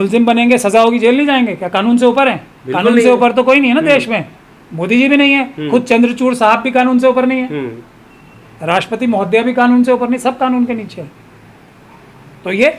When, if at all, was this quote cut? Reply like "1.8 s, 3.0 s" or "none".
none